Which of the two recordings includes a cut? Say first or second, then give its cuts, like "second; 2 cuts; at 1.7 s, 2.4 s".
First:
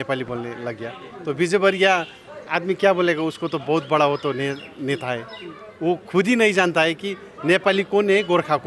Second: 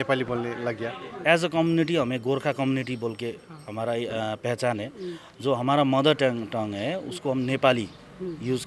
second; 1 cut; at 1.1 s